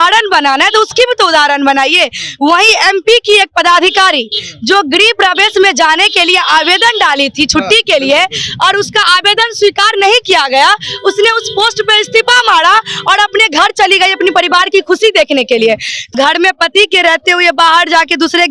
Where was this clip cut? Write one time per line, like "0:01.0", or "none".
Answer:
0:15.9

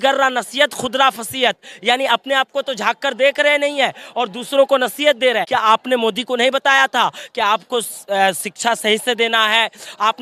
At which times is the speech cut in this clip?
0:05.4

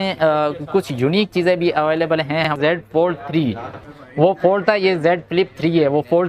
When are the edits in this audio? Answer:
0:02.5
0:04.0

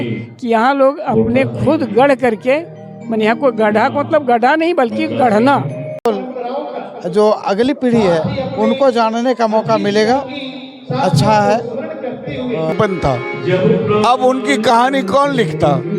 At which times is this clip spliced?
0:06.1
0:12.7

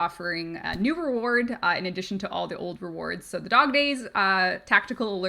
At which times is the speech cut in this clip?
none

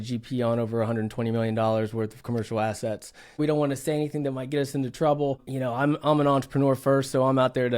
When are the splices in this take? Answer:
0:03.4

